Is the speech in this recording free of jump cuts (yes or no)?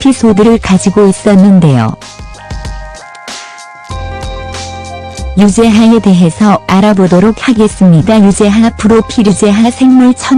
yes